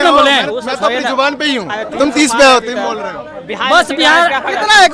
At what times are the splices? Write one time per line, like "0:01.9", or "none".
none